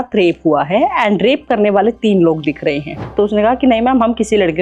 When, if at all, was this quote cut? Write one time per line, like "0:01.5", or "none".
0:03.1